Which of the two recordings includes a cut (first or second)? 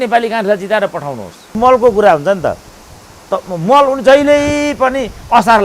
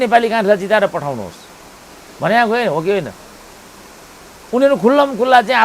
first